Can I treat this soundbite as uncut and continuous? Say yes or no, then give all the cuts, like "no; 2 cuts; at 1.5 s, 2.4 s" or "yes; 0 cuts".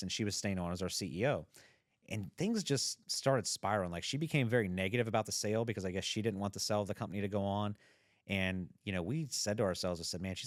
yes; 0 cuts